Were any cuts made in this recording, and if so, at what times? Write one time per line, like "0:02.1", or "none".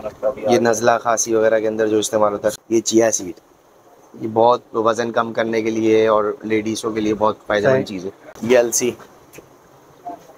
0:02.5
0:08.4

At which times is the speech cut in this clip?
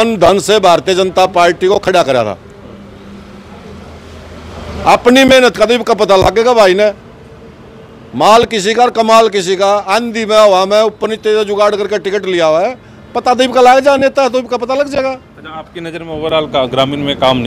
none

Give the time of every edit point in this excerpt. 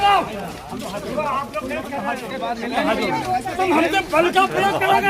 0:02.3

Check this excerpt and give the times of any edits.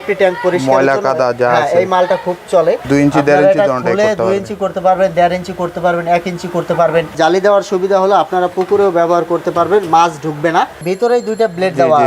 0:02.8
0:07.1
0:10.8

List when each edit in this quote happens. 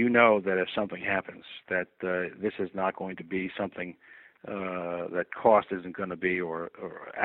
none

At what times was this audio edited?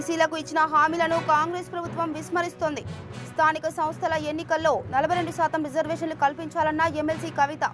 none

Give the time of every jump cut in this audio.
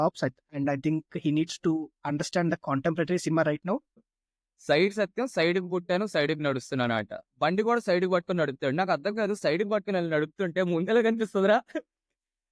0:04.1

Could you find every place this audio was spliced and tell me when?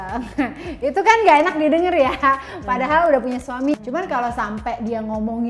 0:03.8

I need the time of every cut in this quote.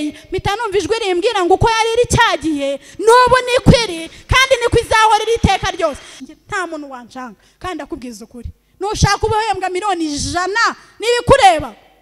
0:06.1

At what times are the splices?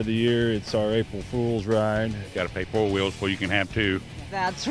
0:02.2

